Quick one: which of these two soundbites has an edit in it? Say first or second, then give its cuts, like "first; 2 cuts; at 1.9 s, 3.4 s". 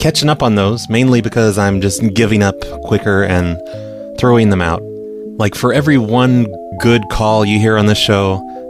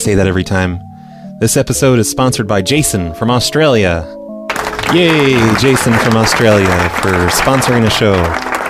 second; 1 cut; at 4.1 s